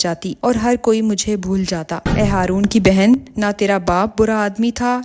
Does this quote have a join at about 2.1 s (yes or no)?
yes